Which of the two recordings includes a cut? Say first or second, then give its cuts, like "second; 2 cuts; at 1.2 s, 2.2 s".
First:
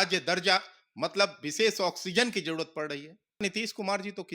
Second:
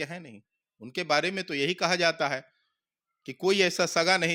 first; 1 cut; at 3.4 s